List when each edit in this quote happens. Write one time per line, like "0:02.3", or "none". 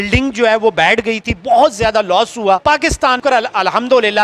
none